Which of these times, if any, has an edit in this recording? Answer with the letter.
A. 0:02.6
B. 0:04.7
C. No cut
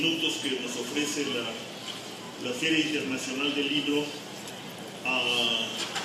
B